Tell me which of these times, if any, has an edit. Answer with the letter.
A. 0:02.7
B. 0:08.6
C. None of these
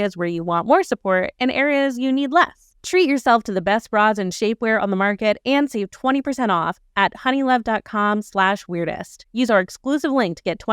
A